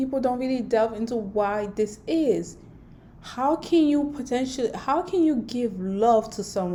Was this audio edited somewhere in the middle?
no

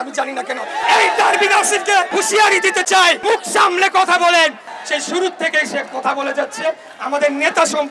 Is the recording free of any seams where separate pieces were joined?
no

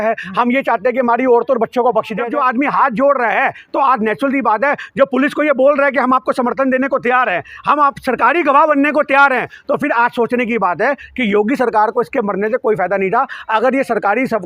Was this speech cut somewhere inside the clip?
yes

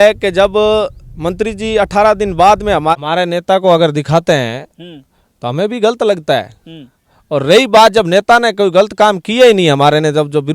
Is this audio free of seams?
no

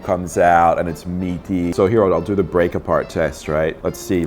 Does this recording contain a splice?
yes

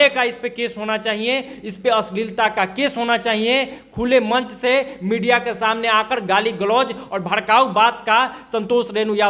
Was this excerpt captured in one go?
yes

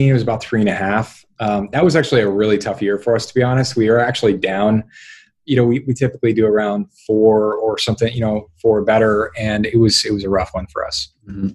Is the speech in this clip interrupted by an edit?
yes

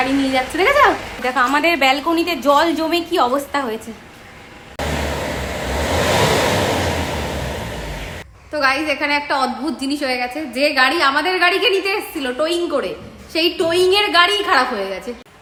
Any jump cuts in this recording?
no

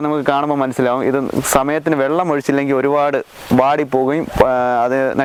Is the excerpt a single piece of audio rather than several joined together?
yes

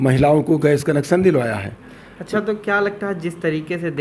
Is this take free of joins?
yes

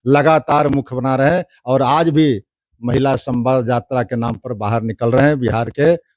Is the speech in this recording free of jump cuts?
yes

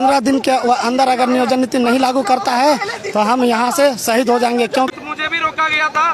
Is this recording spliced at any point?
yes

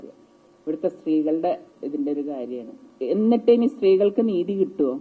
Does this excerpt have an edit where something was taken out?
yes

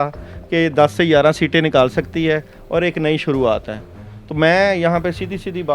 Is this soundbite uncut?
yes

